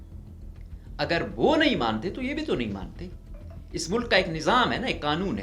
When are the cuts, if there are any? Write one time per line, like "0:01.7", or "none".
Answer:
0:01.0